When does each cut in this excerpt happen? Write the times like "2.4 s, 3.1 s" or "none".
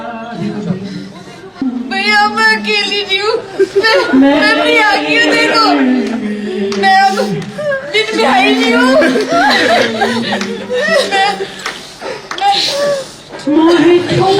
1.6 s